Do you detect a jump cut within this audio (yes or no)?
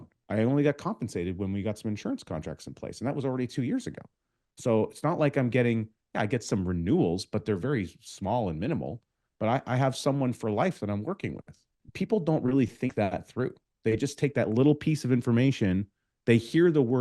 yes